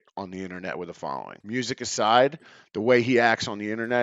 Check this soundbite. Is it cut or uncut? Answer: cut